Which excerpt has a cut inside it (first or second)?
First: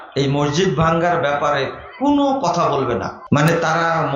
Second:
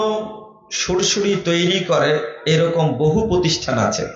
first